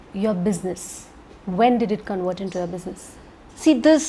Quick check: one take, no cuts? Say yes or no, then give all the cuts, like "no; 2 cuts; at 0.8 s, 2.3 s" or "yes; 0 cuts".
yes; 0 cuts